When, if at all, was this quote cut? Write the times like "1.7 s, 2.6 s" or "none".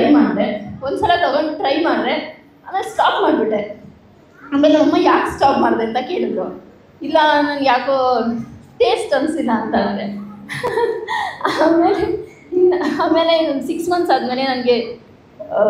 none